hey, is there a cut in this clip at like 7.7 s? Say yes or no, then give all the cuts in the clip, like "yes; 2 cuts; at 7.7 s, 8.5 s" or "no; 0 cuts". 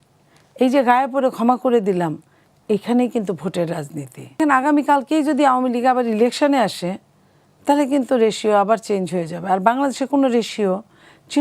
no; 1 cut; at 4.4 s